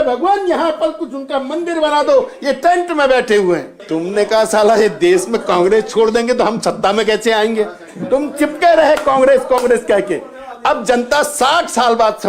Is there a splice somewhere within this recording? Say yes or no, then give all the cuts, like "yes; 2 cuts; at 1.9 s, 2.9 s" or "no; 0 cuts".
yes; 1 cut; at 3.8 s